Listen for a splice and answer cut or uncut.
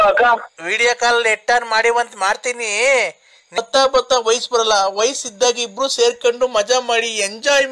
cut